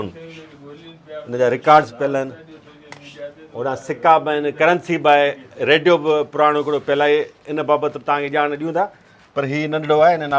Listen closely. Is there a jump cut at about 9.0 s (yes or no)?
no